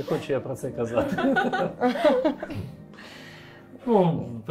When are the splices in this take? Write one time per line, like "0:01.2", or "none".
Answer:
none